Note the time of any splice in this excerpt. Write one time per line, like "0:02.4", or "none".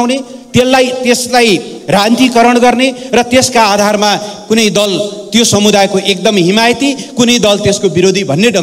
none